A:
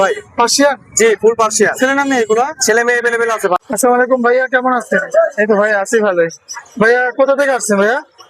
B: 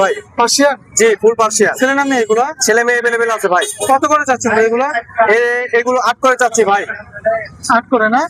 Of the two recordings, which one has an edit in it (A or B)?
A